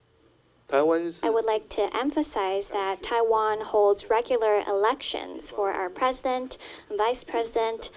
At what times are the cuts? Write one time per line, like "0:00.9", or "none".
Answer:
0:01.2